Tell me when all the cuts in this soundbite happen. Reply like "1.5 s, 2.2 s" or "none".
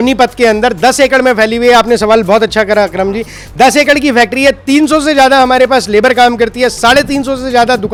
none

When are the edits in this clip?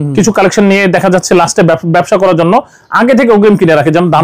none

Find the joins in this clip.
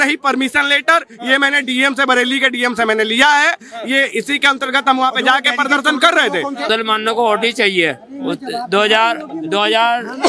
6.7 s

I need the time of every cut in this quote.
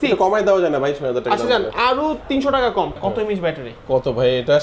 3.0 s

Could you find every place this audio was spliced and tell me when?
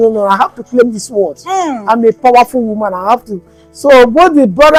none

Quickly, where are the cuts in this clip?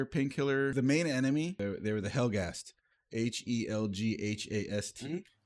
0.7 s, 1.6 s

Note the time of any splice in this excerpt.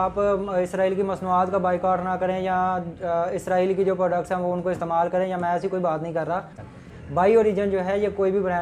6.5 s

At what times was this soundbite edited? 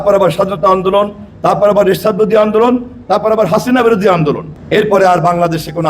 4.5 s

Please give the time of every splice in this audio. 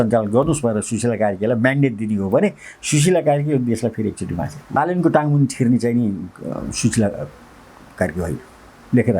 4.8 s

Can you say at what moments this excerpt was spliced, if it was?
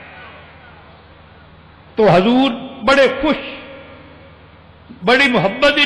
none

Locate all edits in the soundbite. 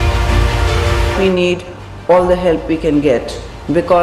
1.2 s

